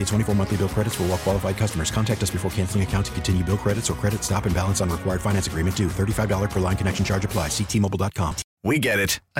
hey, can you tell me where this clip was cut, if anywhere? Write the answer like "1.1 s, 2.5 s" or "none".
8.4 s